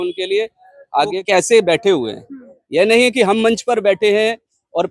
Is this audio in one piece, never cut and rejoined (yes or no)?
no